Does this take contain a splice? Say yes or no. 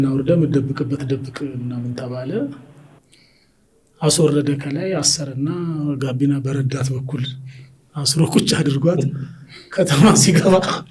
no